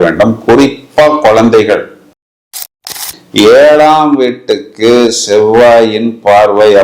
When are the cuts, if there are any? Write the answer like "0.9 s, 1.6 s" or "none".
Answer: 2.7 s